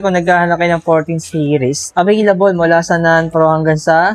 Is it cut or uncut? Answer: uncut